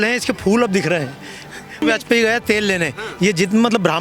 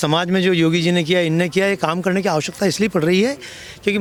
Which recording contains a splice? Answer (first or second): first